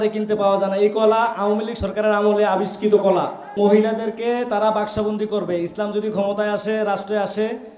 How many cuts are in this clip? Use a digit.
1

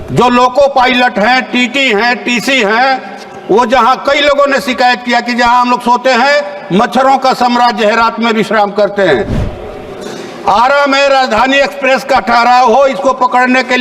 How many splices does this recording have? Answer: 1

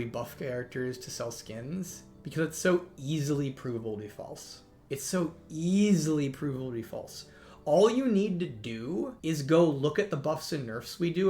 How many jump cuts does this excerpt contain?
1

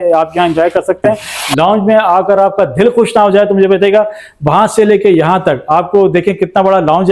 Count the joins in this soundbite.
1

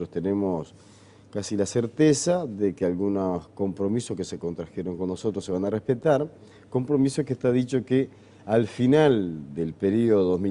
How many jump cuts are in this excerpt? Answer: 1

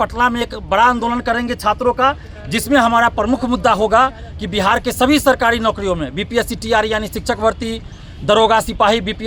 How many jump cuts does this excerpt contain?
0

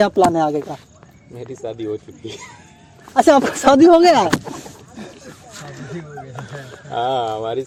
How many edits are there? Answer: 0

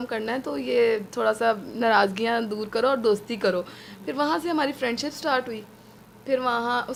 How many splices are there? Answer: 0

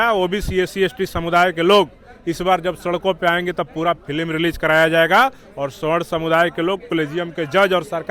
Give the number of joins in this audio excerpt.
0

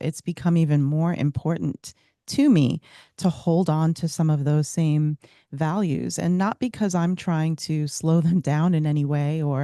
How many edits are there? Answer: 0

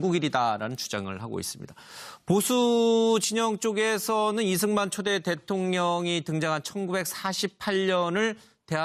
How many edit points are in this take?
0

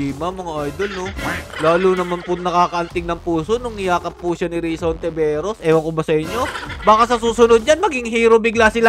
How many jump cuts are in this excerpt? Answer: 0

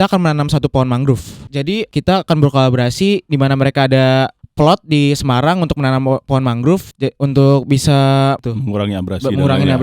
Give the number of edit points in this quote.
3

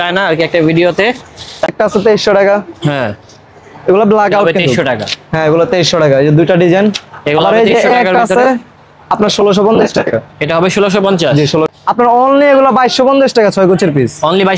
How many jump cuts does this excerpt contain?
2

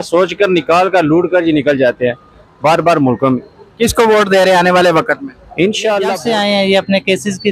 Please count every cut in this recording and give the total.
1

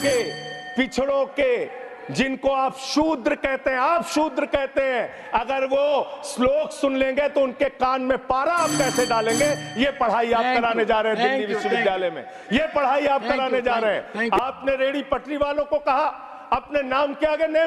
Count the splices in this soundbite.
1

